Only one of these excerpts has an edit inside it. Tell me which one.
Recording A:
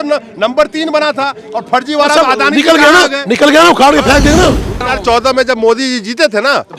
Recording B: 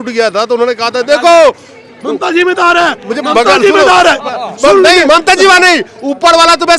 A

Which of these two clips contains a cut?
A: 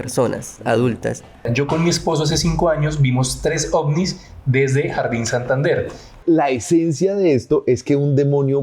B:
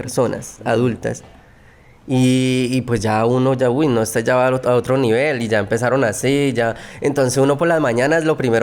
A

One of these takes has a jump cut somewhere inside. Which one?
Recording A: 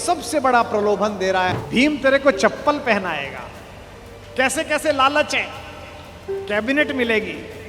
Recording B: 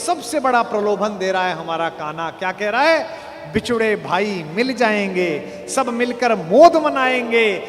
A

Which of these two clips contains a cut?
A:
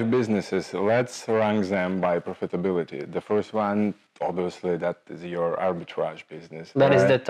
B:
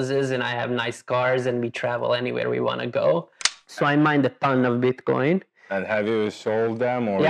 B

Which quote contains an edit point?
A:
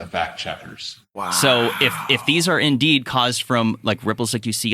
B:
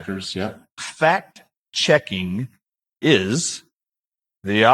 A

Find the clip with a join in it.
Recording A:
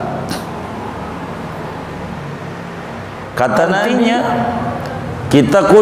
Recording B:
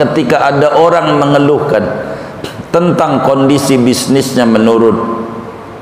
A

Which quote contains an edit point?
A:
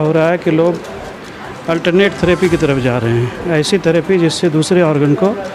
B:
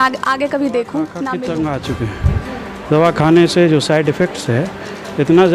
B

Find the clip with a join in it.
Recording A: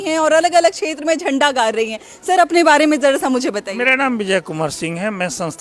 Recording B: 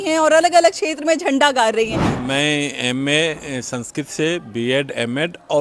B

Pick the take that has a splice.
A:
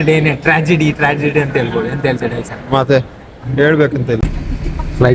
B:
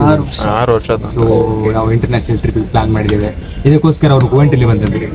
A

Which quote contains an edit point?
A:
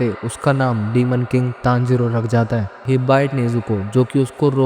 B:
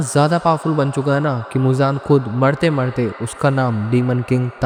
A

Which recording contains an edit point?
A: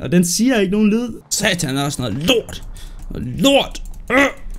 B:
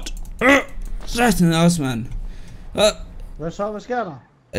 A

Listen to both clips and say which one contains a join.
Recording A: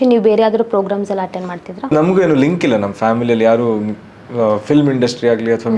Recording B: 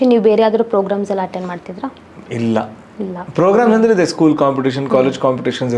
A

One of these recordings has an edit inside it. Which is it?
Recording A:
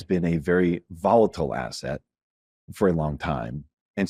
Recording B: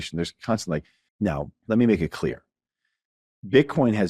B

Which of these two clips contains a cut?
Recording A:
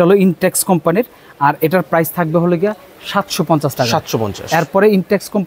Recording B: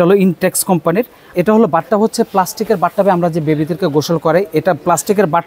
B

